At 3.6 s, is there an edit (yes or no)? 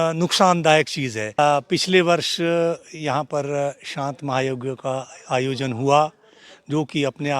no